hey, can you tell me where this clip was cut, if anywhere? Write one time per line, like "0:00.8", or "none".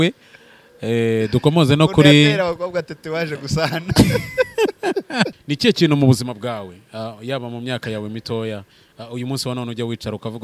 0:05.4